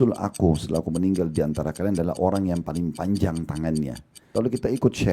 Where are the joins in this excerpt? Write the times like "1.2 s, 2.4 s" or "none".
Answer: 4.2 s